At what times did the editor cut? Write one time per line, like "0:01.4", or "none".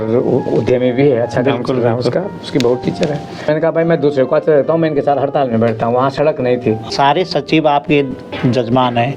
0:03.5
0:06.9